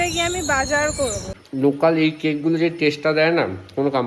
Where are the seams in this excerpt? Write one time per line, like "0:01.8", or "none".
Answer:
0:01.3